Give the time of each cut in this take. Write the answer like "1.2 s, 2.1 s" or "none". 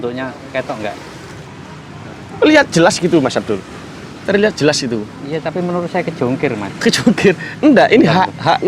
1.5 s

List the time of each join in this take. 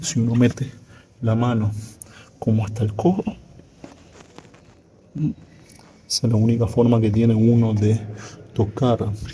none

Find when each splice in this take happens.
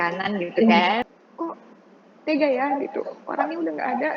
1.0 s

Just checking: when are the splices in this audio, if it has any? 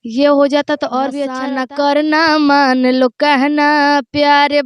1.3 s

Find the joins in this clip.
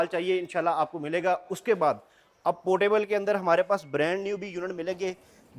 none

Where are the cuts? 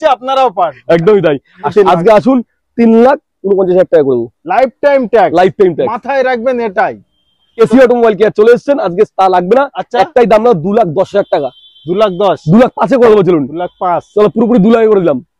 1.7 s, 7.6 s

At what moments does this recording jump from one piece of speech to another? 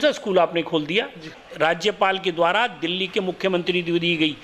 1.3 s

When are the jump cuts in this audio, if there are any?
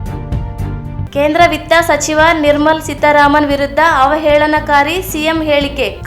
1.1 s

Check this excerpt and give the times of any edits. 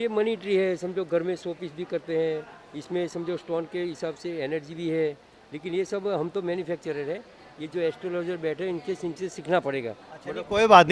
none

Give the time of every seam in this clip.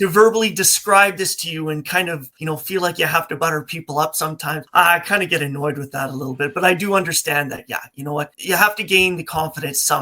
2.3 s, 4.6 s, 8.4 s

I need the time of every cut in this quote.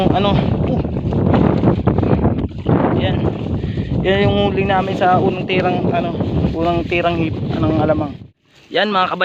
8.3 s

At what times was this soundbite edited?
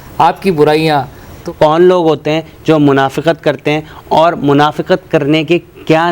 1.8 s

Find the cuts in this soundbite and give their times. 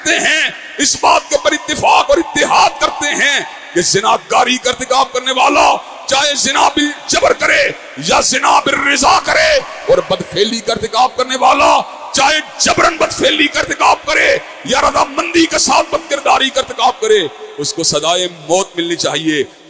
none

